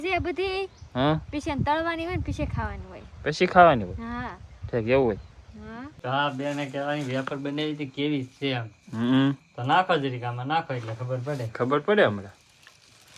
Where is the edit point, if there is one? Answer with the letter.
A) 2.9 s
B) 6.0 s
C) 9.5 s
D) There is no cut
B